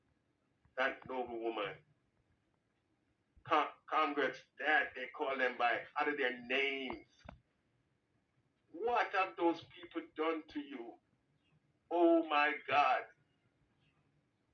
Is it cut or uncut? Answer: uncut